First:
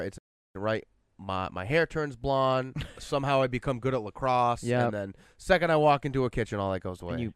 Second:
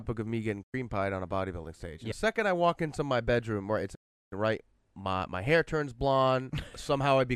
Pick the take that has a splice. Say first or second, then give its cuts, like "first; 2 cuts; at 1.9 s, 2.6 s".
second; 1 cut; at 2.1 s